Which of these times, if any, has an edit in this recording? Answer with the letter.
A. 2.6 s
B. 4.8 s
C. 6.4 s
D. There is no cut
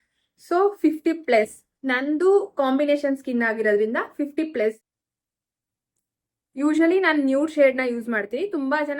B